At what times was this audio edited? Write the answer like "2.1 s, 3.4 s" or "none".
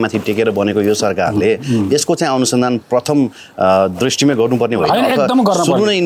none